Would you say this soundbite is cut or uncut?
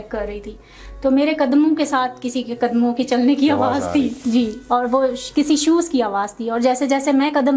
uncut